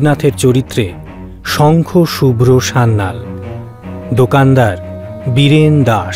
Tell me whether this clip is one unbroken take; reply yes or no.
yes